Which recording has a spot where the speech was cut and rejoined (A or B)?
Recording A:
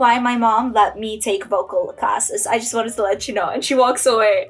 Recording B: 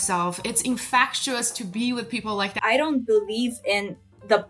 B